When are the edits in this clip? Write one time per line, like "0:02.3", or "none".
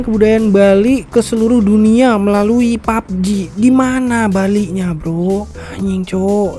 none